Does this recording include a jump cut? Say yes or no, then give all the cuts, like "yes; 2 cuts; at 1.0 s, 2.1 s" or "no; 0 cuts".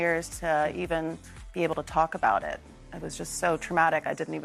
no; 0 cuts